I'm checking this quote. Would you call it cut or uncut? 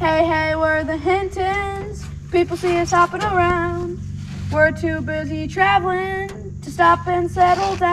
uncut